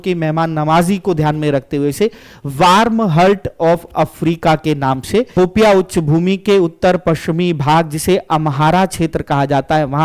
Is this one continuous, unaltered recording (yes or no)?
no